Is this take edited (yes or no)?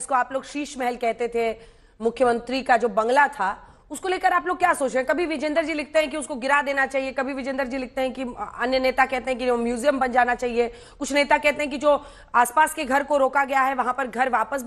no